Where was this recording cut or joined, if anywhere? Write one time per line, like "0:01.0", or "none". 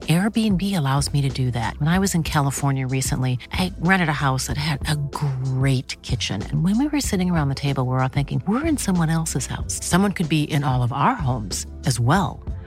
none